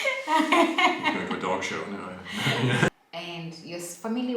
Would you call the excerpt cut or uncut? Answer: cut